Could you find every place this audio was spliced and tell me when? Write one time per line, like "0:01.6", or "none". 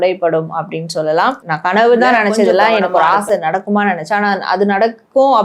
0:01.5

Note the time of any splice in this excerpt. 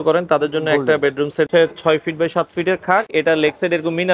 0:01.5
0:03.1

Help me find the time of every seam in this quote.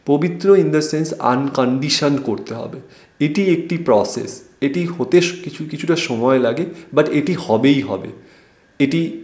none

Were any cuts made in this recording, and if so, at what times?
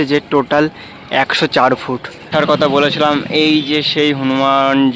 0:02.2

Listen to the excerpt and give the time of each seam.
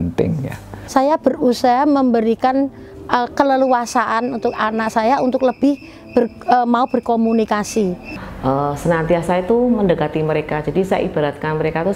none

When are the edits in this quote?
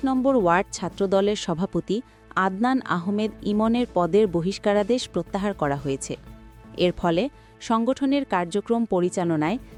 none

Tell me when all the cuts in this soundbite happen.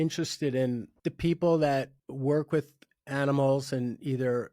0:00.9
0:02.0

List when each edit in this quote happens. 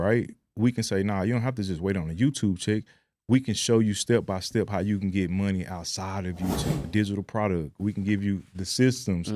0:06.9

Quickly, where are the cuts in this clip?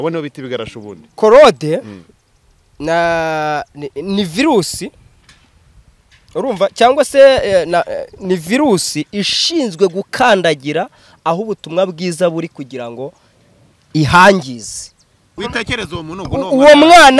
0:15.4

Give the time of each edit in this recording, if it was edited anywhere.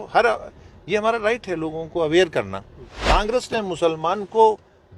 0:03.3

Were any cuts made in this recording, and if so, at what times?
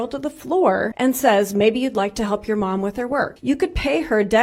0:00.9
0:03.3

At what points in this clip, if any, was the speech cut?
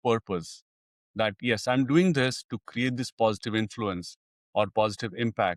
none

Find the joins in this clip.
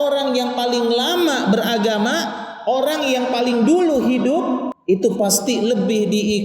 0:04.7

